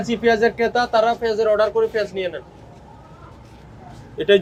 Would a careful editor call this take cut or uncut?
uncut